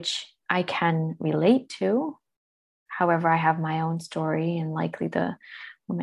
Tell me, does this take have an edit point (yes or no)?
no